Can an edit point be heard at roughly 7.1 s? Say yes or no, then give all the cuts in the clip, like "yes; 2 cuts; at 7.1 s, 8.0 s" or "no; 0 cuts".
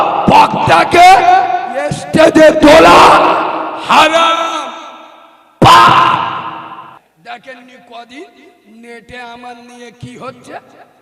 yes; 1 cut; at 7.1 s